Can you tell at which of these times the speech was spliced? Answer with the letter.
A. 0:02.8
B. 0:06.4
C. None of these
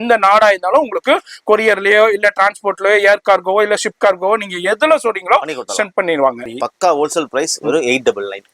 B